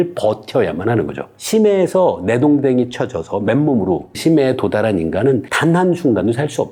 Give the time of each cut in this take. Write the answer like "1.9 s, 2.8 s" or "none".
none